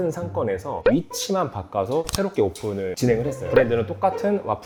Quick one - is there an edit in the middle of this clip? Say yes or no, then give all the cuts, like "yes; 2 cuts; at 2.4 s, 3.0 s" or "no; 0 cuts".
no; 0 cuts